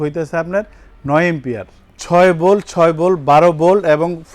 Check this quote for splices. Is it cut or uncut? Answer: cut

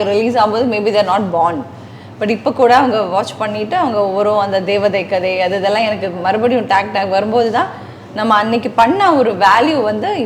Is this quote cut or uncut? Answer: uncut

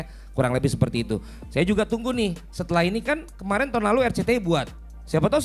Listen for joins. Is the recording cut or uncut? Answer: uncut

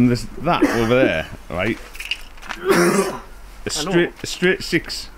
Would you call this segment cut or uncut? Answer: uncut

